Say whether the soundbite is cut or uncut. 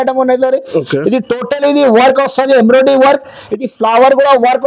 uncut